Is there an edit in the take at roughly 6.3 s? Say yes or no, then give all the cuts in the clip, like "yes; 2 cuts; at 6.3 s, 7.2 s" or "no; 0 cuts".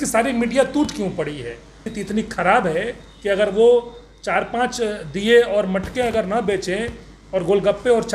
no; 1 cut; at 1.9 s